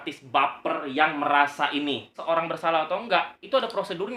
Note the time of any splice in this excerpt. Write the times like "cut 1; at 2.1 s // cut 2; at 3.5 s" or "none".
cut 1; at 2.2 s